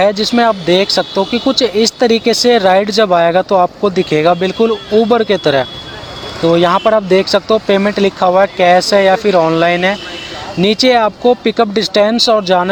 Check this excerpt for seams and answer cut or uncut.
uncut